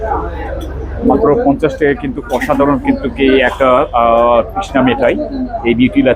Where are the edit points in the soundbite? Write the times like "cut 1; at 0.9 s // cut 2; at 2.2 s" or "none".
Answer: none